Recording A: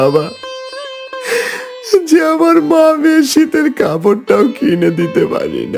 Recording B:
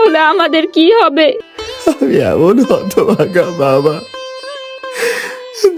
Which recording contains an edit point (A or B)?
B